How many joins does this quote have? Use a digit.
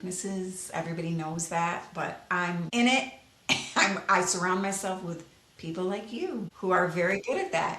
2